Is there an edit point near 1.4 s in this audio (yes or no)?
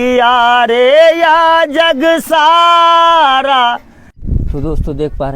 no